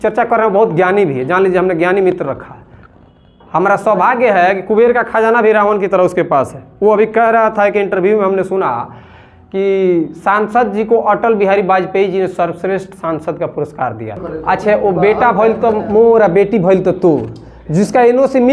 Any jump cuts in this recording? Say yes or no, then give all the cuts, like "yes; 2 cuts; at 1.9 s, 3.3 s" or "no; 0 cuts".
yes; 1 cut; at 14.4 s